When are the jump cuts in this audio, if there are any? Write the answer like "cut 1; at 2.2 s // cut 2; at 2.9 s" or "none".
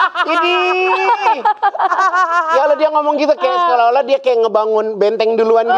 none